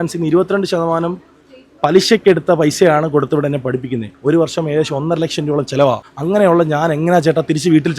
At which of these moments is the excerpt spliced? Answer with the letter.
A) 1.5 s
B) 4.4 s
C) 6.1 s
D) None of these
C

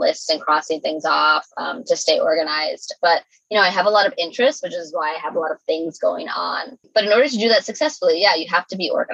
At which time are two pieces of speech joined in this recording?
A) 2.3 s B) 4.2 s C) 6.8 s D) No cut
C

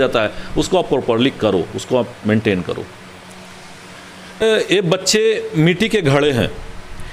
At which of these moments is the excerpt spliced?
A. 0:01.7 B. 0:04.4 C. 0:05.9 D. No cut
B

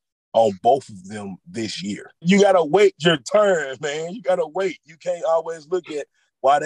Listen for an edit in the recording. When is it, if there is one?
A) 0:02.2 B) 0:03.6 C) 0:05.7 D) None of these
A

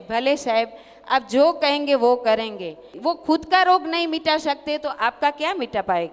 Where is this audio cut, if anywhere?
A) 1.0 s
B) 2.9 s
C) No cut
B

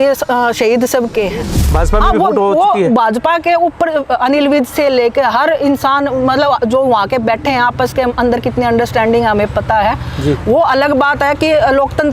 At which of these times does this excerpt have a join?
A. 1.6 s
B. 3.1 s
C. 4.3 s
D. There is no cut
A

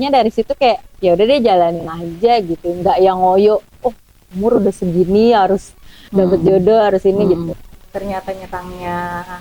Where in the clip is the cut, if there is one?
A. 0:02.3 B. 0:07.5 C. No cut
B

